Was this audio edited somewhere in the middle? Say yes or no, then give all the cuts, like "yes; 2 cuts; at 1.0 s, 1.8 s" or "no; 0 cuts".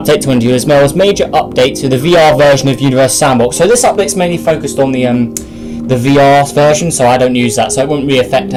no; 0 cuts